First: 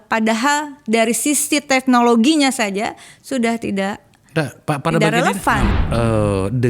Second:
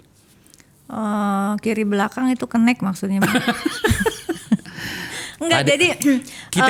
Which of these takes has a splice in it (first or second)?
first